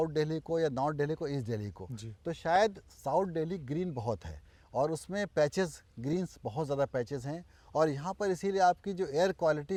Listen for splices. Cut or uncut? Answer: uncut